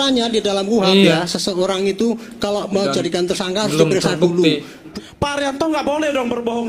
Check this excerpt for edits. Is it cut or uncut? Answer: cut